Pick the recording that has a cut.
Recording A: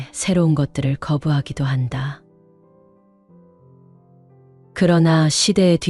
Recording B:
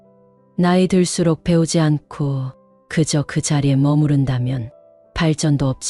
A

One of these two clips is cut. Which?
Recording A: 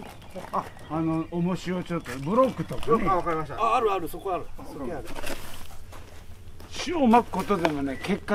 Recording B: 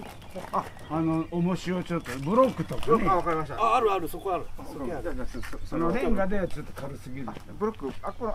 A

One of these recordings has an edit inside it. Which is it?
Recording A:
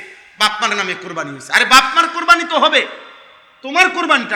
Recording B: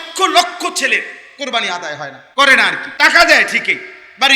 B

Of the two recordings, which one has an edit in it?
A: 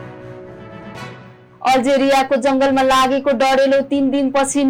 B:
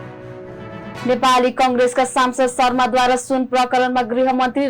B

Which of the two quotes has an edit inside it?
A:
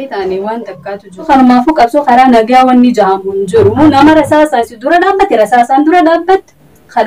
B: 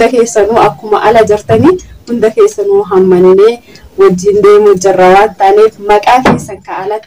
A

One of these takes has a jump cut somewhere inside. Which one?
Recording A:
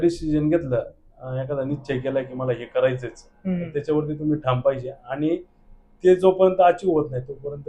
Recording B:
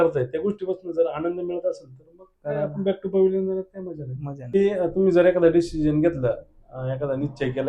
B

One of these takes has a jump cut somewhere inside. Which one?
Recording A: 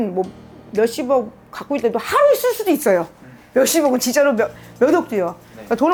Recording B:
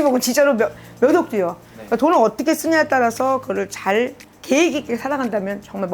B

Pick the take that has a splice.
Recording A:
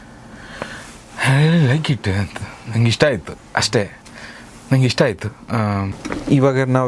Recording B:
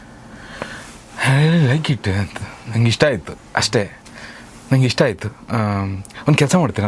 A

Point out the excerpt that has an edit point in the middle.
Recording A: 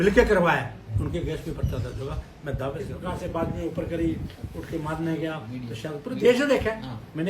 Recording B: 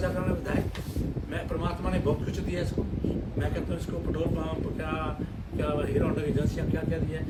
A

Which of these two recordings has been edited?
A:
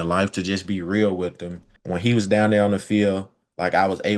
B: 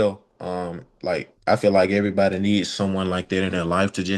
A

